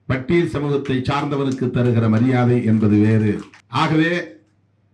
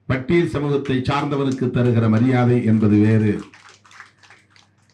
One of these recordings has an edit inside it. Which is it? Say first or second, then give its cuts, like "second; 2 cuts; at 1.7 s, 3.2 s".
first; 1 cut; at 3.6 s